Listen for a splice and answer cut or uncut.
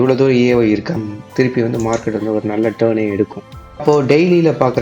cut